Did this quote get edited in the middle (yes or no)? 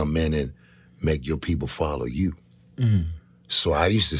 no